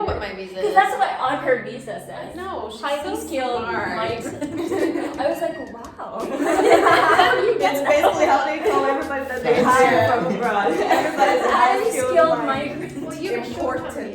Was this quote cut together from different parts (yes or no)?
yes